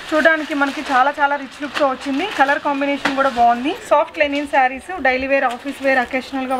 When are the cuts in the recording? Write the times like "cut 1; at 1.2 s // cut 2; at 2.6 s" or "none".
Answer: cut 1; at 3.8 s